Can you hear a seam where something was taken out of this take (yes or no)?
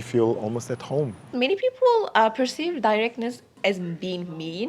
yes